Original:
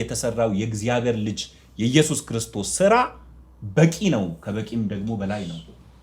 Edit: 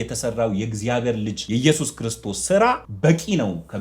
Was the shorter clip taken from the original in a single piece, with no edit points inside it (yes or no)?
no